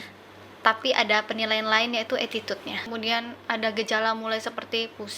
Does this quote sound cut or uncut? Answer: cut